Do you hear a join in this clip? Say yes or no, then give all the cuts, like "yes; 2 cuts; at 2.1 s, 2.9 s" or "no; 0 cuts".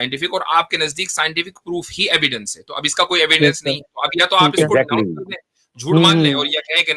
no; 0 cuts